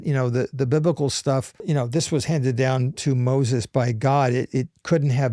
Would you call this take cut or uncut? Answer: cut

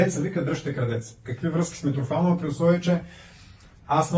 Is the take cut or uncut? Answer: uncut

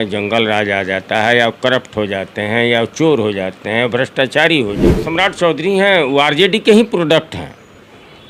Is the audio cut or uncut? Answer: cut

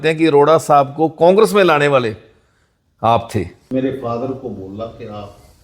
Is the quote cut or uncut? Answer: cut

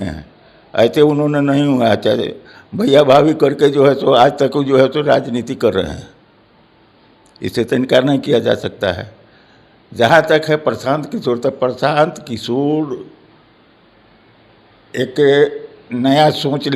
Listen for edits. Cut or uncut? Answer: uncut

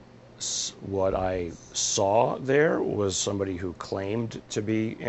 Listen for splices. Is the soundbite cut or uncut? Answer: uncut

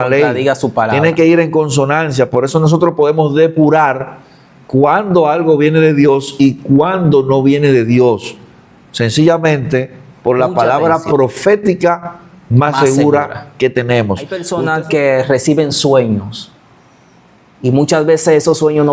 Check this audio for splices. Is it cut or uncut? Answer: cut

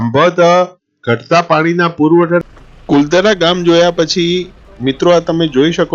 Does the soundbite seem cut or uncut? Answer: cut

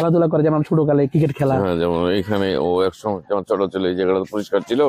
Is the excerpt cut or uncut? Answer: uncut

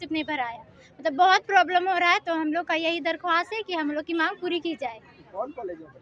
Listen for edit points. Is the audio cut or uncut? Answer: uncut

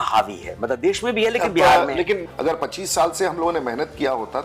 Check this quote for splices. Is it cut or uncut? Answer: cut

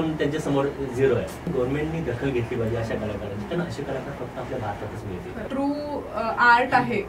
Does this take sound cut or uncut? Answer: cut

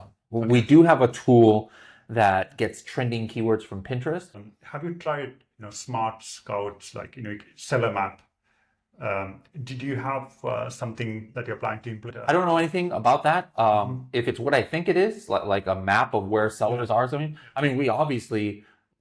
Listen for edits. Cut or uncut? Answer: cut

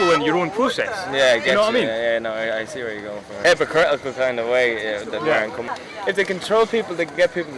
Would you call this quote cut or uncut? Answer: cut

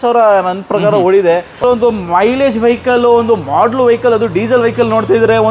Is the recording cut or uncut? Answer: cut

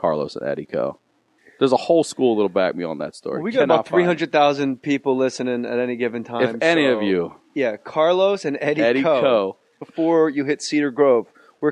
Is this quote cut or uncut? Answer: uncut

